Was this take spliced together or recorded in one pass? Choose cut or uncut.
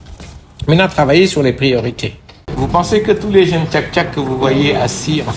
cut